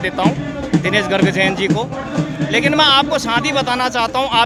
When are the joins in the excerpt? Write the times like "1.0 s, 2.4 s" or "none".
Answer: none